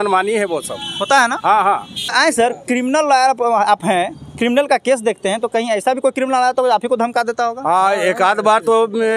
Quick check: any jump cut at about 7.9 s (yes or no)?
no